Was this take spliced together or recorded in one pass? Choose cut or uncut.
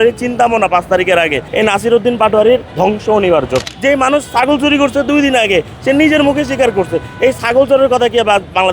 cut